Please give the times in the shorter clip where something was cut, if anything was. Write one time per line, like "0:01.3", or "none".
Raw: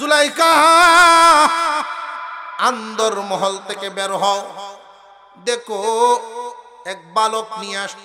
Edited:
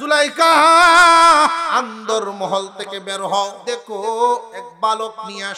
0:01.6
0:03.6
0:04.6